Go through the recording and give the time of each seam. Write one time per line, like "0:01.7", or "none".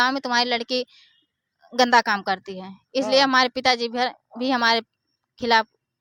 none